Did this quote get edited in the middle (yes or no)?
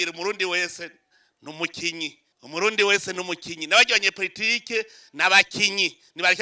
yes